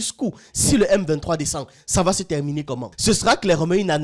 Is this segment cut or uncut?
uncut